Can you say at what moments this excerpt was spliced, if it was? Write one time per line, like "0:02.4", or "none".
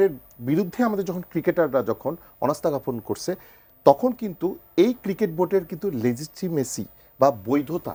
none